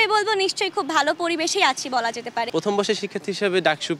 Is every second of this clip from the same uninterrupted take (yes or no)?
no